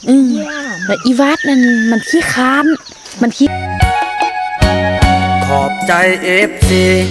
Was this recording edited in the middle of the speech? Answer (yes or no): yes